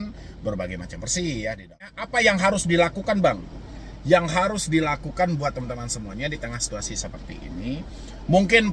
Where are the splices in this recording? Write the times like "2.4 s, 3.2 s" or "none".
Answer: 2.0 s